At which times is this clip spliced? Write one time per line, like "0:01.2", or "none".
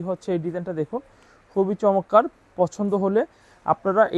none